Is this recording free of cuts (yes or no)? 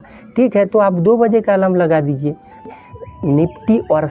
no